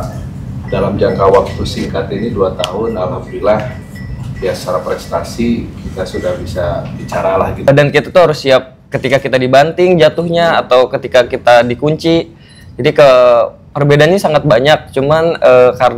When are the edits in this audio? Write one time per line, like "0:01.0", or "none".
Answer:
0:07.7